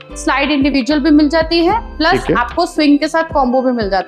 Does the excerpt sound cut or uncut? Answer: uncut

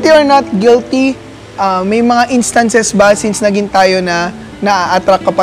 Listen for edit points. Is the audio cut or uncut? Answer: uncut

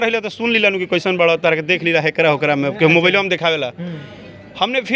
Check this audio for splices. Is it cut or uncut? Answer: uncut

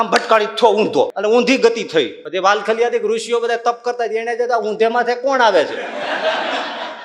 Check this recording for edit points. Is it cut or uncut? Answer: cut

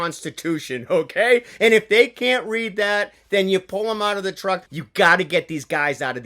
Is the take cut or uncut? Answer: cut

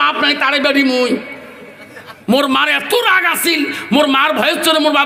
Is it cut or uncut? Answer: uncut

